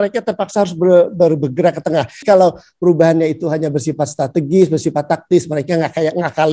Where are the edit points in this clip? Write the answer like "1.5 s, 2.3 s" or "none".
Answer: 2.2 s